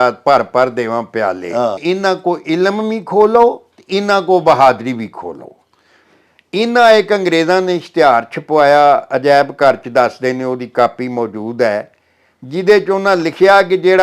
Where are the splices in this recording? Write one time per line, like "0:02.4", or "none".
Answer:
0:01.8